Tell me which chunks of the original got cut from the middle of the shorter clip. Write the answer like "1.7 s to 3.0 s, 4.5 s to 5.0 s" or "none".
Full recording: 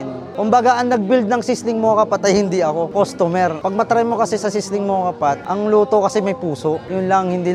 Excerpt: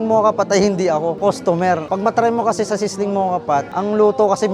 none